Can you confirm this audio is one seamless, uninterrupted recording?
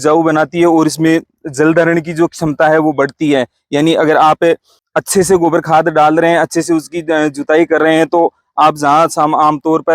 yes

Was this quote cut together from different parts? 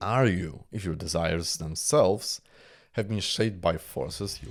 no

